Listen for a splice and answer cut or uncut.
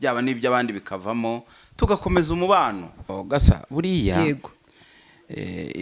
cut